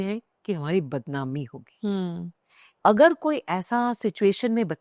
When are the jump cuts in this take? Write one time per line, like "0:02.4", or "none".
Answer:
0:02.6